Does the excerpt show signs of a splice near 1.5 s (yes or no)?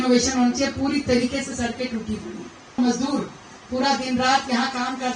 no